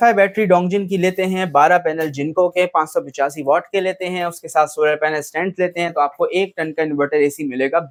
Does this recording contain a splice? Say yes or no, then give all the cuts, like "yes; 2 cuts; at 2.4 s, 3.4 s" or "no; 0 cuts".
no; 0 cuts